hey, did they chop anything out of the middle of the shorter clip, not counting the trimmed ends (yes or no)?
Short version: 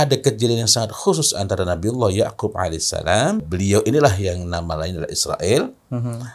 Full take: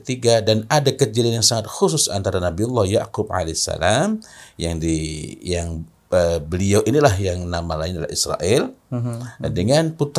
yes